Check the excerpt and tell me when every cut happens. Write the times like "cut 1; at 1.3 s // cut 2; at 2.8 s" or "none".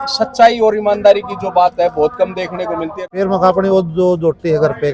cut 1; at 3.0 s